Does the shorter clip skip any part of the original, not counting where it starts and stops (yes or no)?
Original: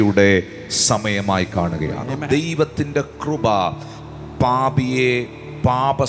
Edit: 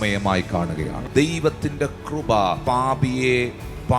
yes